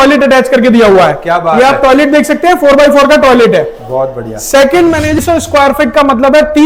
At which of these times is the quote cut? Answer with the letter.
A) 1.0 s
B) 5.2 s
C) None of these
B